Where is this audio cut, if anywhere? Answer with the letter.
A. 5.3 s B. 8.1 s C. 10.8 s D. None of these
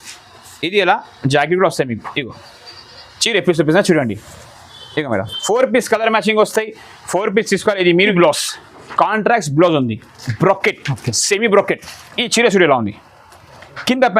B